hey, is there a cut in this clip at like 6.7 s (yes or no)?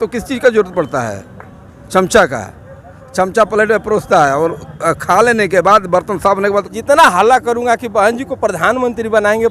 yes